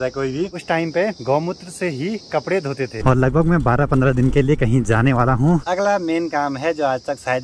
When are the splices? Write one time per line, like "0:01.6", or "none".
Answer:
0:00.7
0:03.0
0:05.7